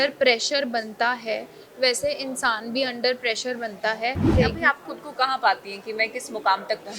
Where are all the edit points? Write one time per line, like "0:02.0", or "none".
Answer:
0:04.3